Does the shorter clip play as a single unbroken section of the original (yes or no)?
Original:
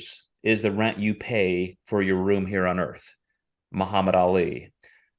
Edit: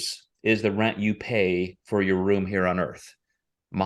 yes